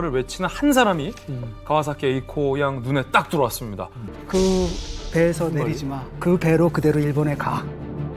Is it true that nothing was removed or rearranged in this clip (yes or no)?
no